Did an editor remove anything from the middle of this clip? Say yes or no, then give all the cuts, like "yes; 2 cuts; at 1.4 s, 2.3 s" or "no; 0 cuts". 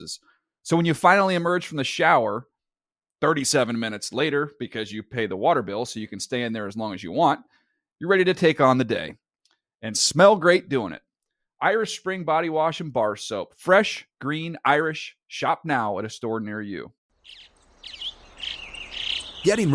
yes; 1 cut; at 17.0 s